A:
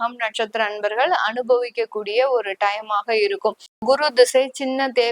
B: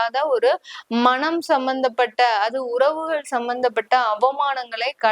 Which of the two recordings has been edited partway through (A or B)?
A